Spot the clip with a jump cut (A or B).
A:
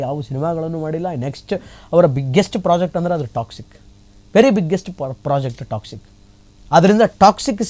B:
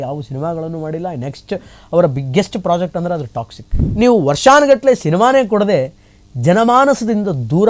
B